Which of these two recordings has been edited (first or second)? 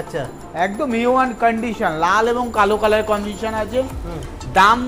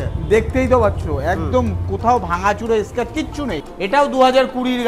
second